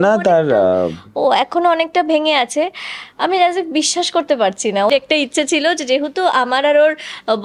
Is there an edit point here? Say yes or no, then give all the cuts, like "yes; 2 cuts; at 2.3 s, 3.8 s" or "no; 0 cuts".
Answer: yes; 1 cut; at 4.9 s